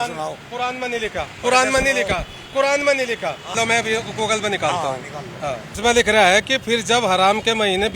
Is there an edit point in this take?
yes; 1 cut; at 5.7 s

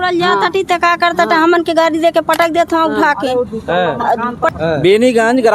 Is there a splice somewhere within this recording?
yes; 1 cut; at 4.5 s

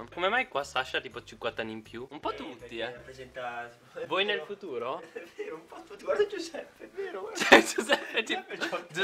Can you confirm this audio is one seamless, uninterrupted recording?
yes; 0 cuts

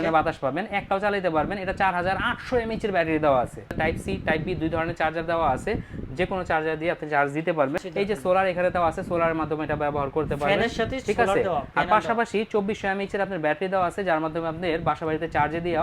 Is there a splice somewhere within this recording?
yes; 2 cuts; at 3.8 s, 7.8 s

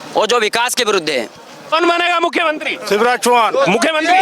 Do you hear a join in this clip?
yes; 1 cut; at 1.7 s

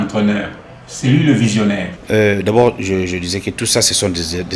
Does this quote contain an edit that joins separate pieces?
yes; 1 cut; at 1.9 s

